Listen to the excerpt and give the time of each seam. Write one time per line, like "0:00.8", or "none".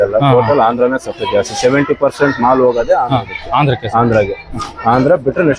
none